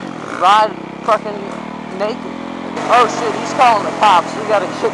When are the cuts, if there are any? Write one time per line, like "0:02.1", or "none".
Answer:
0:02.8